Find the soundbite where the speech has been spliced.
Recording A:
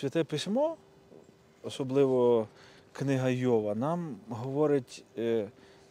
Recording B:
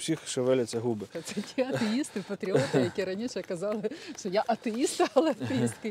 B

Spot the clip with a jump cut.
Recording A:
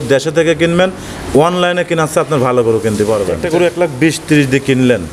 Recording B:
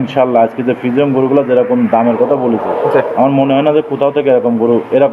A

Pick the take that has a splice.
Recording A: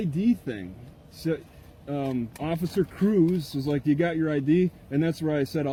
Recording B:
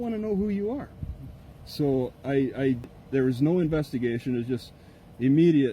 B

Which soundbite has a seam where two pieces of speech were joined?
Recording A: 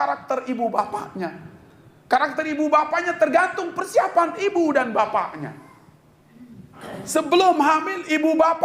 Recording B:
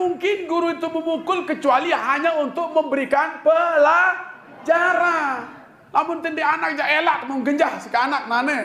A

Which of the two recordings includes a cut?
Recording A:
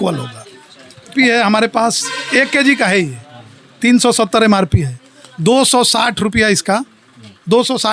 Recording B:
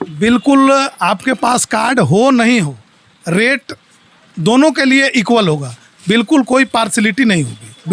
A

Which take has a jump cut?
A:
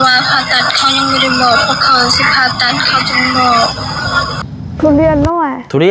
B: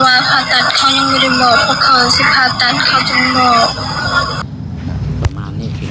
A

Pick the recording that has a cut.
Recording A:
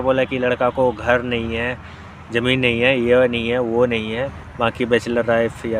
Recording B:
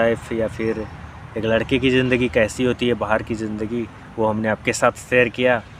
A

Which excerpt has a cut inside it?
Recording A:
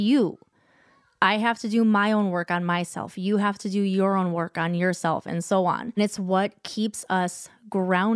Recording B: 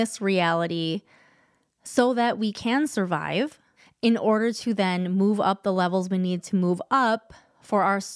A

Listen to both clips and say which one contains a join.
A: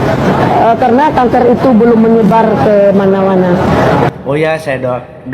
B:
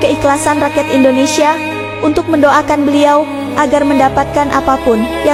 A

